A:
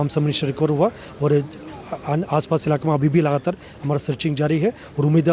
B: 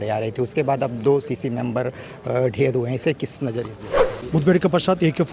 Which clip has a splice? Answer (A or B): B